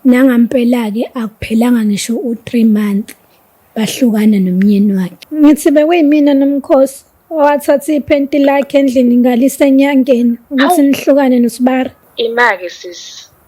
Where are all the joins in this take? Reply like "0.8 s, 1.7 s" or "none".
5.2 s, 12.0 s